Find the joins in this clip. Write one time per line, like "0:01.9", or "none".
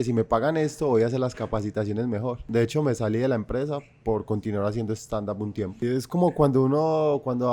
0:02.4
0:05.8